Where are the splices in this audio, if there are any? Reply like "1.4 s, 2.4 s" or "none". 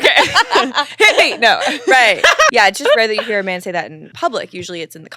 2.5 s, 4.0 s

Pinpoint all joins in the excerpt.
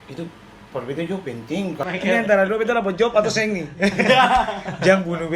1.9 s

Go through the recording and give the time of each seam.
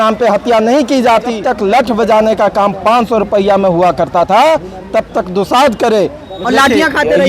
1.3 s, 6.3 s

